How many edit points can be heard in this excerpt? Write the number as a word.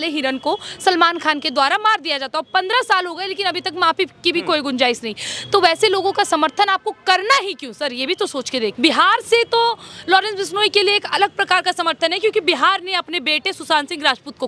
one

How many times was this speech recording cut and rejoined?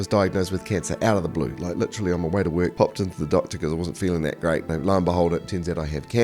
two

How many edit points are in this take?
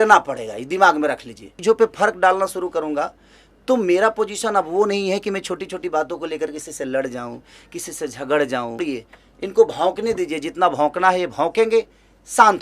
two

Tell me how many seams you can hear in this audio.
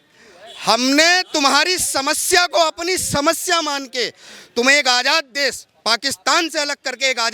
zero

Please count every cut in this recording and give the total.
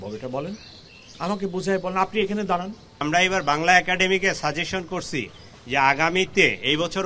one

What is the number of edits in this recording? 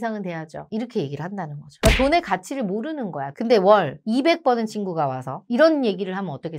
one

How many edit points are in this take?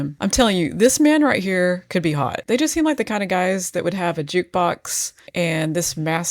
one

